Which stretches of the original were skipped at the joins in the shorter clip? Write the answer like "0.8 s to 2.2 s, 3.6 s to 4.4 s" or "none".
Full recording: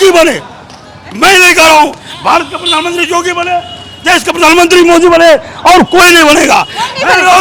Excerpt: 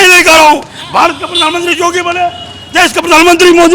none